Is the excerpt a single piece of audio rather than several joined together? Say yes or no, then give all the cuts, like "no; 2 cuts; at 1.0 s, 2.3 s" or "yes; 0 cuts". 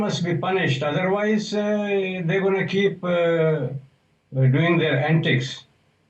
yes; 0 cuts